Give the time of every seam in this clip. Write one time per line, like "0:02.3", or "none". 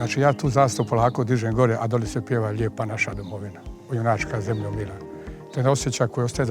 none